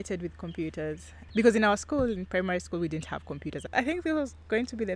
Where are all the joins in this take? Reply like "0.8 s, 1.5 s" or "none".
1.2 s, 3.7 s

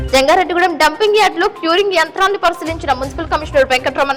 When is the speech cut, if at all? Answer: none

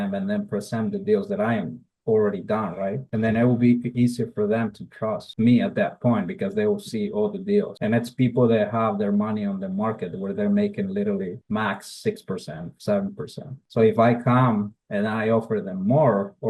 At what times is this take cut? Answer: none

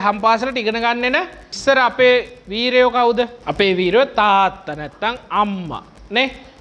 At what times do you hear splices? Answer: 1.4 s, 3.4 s

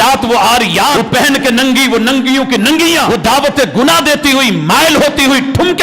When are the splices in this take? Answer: 1.0 s, 3.1 s

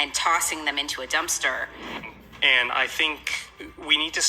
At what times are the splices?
2.0 s

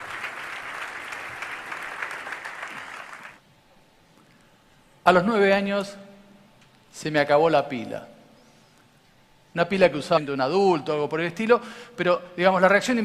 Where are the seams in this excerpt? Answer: none

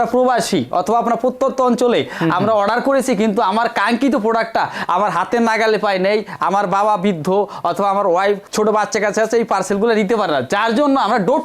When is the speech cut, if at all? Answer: none

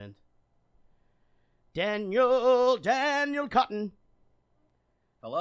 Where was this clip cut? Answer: none

